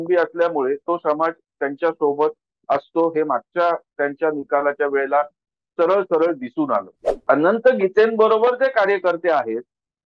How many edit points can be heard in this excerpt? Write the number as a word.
one